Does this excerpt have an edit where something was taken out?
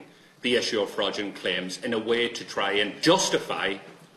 yes; 1 cut; at 3.0 s

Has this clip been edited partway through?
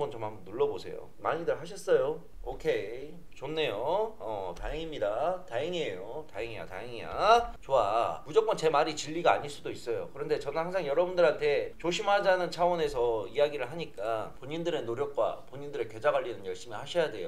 yes; 2 cuts; at 8.2 s, 14.3 s

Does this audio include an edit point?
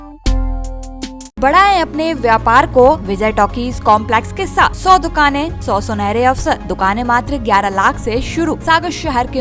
yes; 6 cuts; at 1.4 s, 3.1 s, 4.8 s, 5.6 s, 6.7 s, 8.6 s

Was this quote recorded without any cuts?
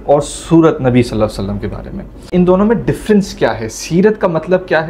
no; 1 cut; at 2.3 s

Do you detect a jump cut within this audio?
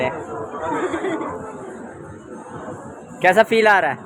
no; 0 cuts

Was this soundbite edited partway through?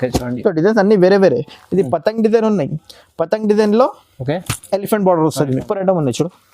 yes; 1 cut; at 5.6 s

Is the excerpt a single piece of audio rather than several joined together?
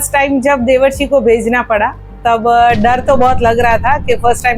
yes; 0 cuts

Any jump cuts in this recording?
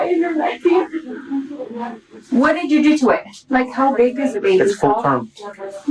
yes; 1 cut; at 3.4 s

